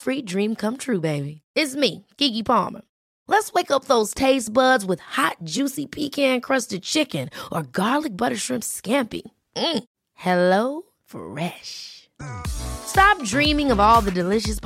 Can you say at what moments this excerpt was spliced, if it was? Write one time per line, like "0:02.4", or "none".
none

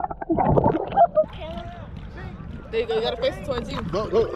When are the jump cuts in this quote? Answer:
0:01.3

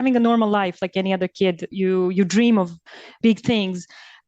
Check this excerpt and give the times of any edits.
0:01.7
0:03.1

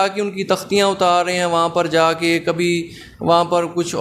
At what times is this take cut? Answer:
none

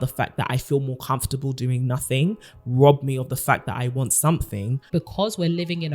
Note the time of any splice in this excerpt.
0:04.8

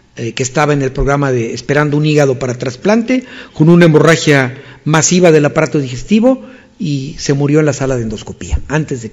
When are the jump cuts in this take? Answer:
0:03.2

